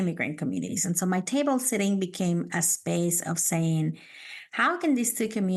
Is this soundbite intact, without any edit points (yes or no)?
yes